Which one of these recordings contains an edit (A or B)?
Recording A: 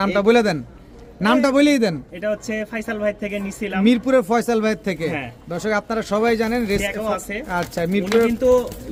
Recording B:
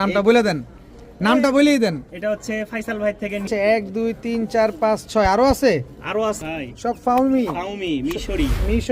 B